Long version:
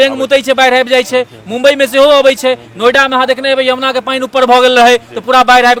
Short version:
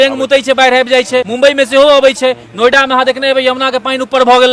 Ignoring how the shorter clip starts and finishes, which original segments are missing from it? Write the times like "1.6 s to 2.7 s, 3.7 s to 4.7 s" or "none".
1.3 s to 1.5 s